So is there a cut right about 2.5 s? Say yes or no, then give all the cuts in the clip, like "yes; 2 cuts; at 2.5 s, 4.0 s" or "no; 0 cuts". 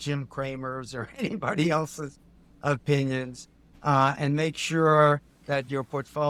no; 0 cuts